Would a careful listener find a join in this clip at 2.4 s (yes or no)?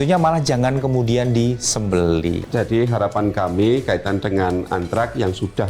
yes